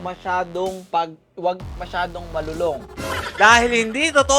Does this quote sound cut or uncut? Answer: cut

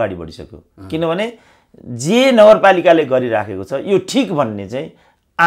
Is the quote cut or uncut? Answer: uncut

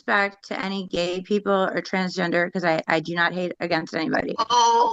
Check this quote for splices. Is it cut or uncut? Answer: uncut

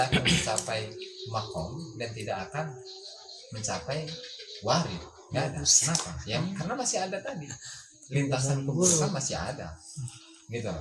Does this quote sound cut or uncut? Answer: uncut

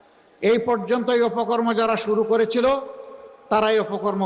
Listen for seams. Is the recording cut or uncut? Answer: uncut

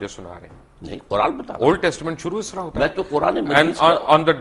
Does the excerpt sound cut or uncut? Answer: uncut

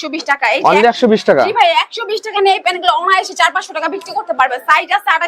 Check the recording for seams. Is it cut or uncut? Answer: uncut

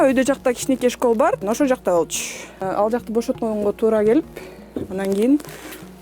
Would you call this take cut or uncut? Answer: cut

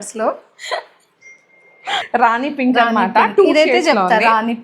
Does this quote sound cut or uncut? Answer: cut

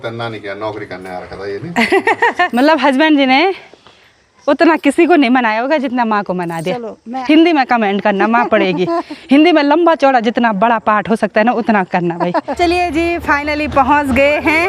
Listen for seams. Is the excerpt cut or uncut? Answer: cut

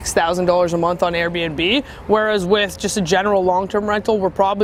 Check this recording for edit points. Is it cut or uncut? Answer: uncut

